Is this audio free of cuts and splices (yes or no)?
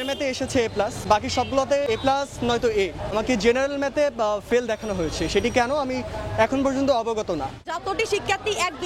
no